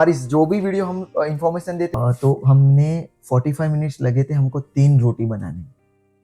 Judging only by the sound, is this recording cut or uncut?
cut